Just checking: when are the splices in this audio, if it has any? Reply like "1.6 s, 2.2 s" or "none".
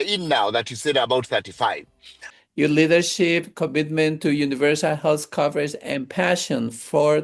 2.2 s